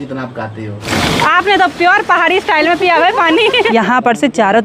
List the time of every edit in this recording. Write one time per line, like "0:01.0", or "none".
0:00.9
0:03.7